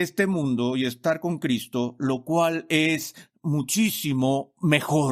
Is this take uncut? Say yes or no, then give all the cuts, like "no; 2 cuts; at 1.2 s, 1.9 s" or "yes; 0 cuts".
yes; 0 cuts